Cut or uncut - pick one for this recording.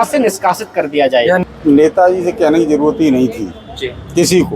cut